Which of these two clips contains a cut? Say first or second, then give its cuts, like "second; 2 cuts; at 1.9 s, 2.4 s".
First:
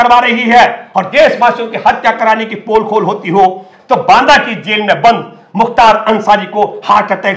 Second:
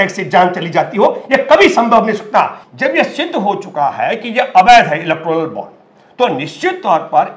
second; 1 cut; at 2.6 s